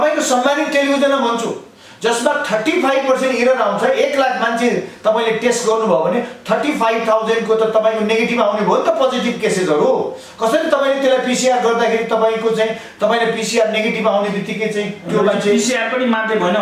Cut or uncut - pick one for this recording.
uncut